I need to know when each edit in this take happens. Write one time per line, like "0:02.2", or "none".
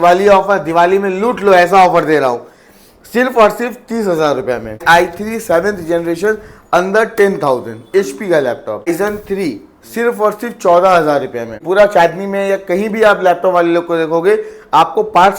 0:04.8
0:08.9
0:11.6